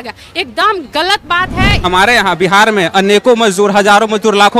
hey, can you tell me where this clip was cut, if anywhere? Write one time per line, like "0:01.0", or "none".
0:01.8